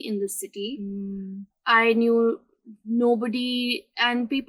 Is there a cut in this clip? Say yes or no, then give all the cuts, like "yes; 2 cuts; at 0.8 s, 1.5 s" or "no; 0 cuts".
no; 0 cuts